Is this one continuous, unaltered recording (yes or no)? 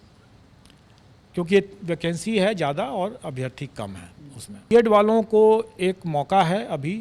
no